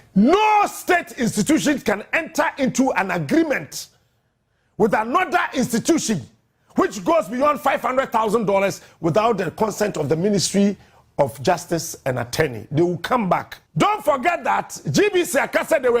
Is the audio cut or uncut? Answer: cut